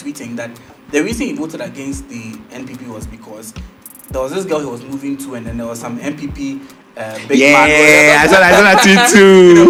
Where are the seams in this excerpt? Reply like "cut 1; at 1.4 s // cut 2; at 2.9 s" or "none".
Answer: none